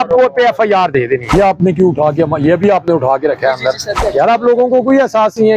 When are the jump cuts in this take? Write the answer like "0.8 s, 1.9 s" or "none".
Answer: 1.3 s, 3.9 s